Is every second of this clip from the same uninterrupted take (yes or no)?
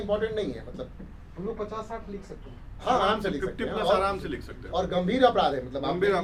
yes